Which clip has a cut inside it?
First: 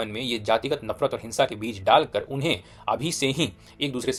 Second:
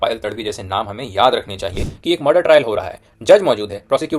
second; 1 cut; at 1.9 s

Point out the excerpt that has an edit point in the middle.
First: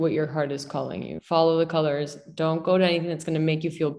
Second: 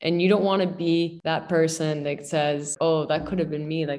second; 2 cuts; at 1.2 s, 2.7 s

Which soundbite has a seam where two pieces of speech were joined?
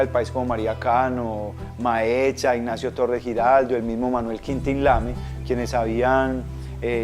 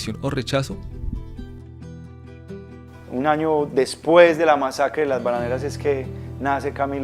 second; 1 cut; at 1.0 s

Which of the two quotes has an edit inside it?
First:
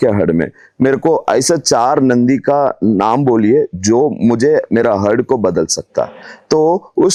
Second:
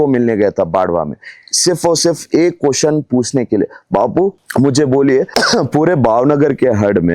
second; 2 cuts; at 4.4 s, 5.3 s

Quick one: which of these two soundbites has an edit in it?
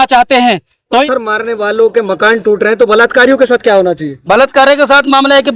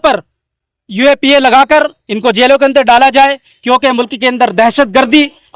first; 1 cut; at 1.1 s

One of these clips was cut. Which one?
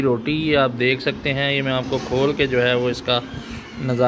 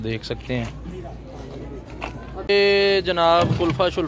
second; 1 cut; at 2.5 s

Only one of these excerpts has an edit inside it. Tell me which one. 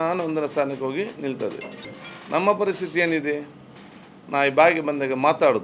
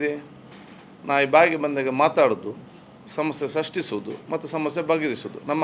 first; 1 cut; at 1.9 s

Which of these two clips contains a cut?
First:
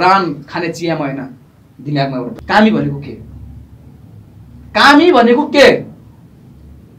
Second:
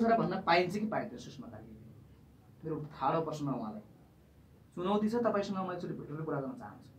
first; 1 cut; at 2.3 s

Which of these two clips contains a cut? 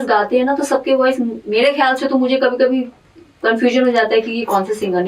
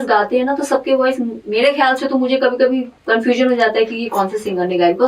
second; 1 cut; at 2.9 s

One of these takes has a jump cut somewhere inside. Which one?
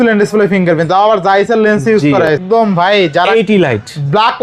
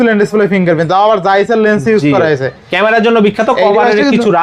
first; 1 cut; at 2.3 s

